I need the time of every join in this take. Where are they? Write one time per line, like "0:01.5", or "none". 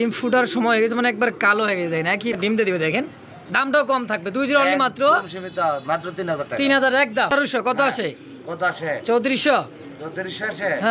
0:02.4
0:07.3